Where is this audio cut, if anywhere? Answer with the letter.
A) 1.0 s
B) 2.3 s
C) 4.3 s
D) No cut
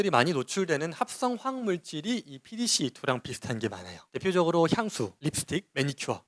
D